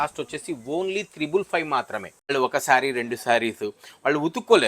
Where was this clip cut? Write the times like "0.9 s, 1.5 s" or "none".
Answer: 2.3 s